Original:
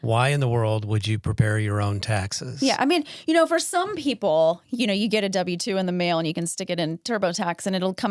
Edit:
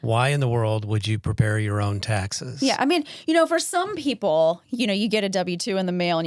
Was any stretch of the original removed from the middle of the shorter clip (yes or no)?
no